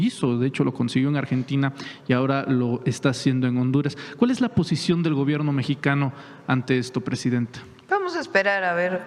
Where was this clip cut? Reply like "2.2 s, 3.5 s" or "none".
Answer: none